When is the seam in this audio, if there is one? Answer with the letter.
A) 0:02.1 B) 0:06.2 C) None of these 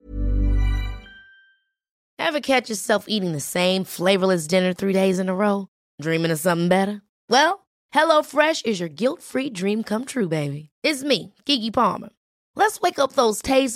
A